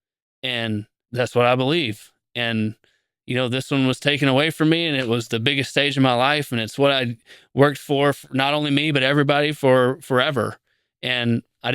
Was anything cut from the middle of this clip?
yes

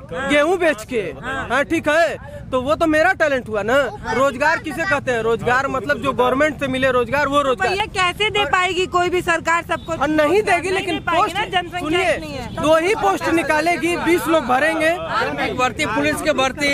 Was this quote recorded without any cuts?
yes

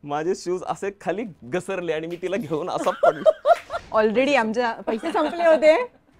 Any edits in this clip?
yes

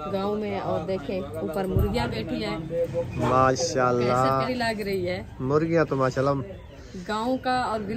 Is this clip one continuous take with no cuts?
no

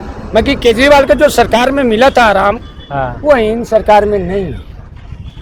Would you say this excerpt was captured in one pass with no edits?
yes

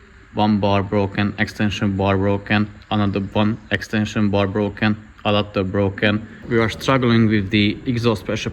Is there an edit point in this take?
yes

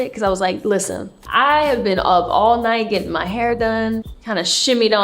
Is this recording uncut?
no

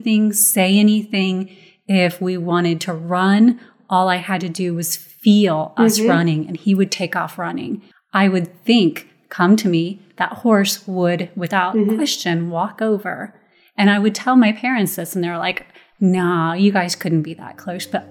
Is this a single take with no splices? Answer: no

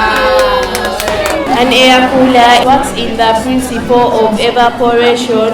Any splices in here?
yes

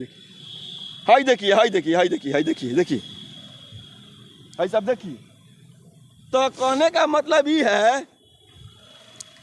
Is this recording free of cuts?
yes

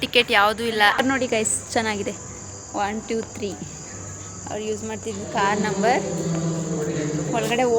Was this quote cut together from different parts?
yes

